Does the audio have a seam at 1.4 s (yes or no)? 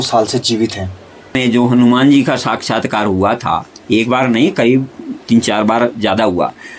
yes